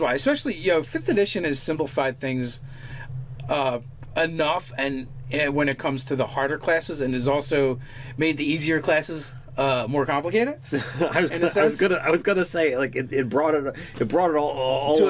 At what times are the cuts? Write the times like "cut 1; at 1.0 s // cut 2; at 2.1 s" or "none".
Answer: cut 1; at 14.2 s